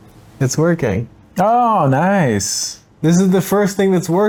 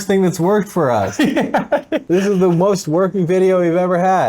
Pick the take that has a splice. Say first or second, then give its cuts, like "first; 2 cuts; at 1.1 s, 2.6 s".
second; 1 cut; at 2.0 s